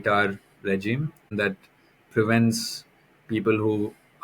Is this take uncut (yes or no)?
no